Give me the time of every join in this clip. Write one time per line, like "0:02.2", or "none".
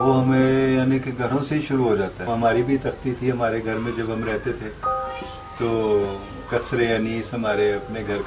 0:02.2

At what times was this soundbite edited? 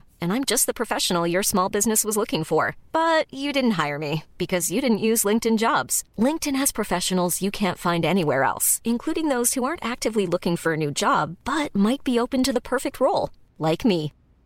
none

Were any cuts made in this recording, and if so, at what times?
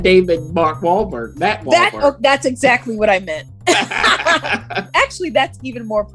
0:04.9

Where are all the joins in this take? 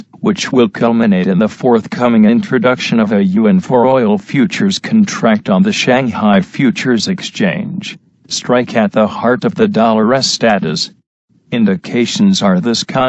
none

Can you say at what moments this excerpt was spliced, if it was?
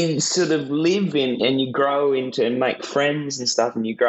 0:01.4

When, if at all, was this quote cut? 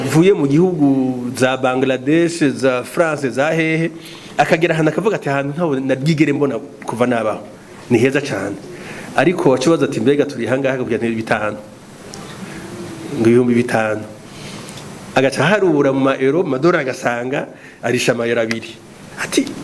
none

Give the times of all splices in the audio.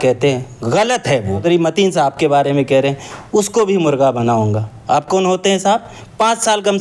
0:01.4

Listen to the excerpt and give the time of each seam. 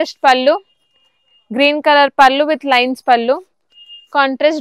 none

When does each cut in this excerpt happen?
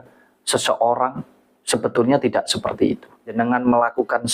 0:03.3

